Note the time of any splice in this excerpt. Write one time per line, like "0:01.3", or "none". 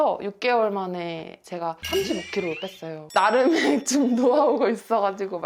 none